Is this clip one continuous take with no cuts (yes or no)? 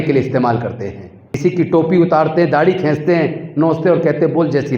no